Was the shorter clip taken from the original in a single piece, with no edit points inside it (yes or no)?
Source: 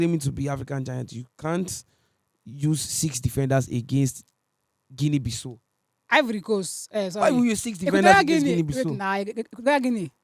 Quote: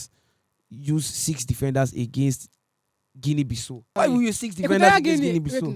no